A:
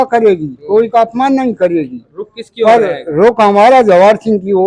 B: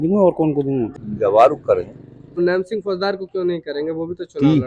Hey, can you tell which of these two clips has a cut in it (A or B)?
B